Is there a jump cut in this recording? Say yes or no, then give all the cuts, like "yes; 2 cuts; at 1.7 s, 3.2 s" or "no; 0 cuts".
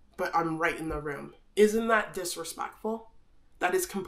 no; 0 cuts